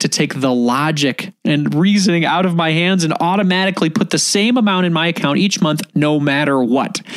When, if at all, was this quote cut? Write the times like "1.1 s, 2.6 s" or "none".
1.3 s